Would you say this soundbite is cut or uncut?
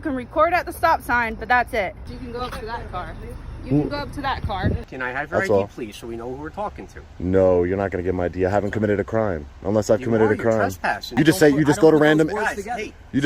cut